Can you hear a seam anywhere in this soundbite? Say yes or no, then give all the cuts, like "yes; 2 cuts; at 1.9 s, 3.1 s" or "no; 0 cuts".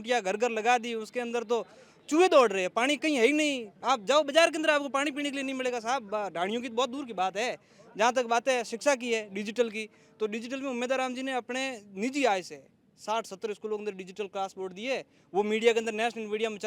no; 0 cuts